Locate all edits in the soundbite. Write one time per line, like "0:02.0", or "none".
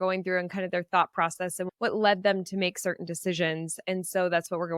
0:01.7